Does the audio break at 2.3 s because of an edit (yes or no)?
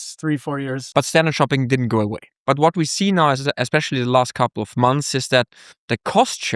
yes